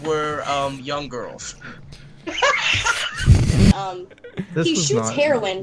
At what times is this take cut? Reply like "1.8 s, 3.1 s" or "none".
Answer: 3.7 s